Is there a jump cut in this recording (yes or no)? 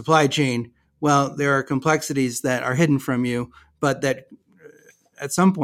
no